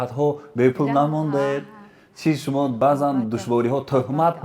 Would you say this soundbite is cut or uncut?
cut